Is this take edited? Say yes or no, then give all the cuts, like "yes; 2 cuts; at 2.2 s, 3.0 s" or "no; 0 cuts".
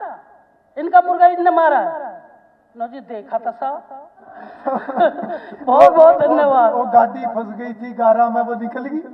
yes; 1 cut; at 4.4 s